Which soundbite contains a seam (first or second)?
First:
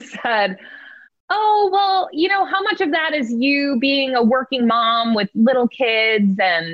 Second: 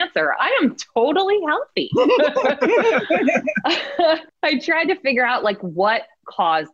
second